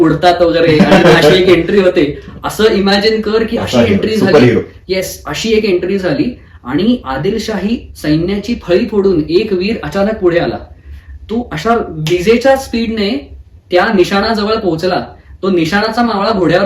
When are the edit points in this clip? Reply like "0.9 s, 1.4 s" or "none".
none